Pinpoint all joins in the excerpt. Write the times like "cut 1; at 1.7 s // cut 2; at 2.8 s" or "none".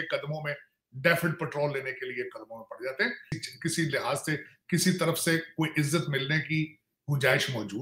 cut 1; at 3.4 s